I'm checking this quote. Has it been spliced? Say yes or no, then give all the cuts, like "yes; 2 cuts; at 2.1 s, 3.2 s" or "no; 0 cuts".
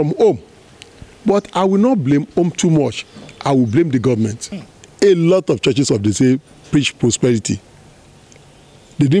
yes; 1 cut; at 4.5 s